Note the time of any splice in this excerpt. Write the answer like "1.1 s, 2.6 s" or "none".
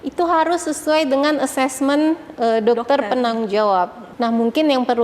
4.0 s